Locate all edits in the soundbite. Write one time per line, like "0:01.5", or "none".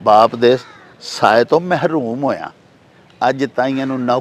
none